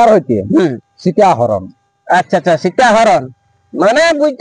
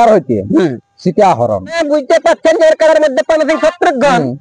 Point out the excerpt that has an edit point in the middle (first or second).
second